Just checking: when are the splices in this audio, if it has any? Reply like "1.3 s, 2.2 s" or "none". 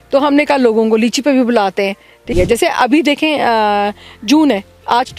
2.2 s